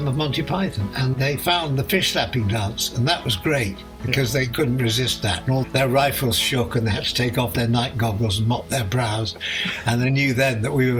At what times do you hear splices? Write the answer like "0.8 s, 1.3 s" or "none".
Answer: none